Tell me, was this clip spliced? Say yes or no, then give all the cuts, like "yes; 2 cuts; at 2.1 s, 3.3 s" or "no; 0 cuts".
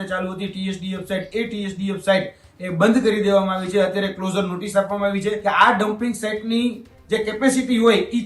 yes; 1 cut; at 5.4 s